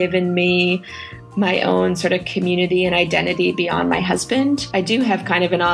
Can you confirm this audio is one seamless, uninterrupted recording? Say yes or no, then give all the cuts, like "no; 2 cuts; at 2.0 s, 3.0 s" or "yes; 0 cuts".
no; 1 cut; at 4.7 s